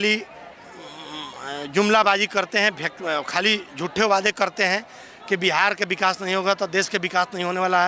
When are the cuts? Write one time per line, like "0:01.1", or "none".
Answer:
none